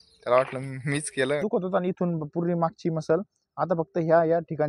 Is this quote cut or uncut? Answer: cut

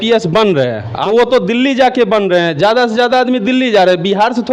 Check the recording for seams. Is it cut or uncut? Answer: cut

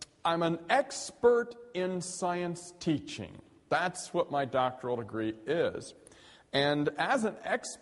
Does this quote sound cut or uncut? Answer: cut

